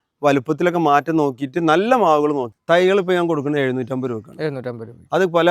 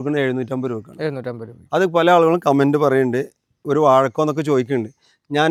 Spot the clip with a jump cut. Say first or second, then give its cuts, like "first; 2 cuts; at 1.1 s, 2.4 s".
first; 1 cut; at 2.5 s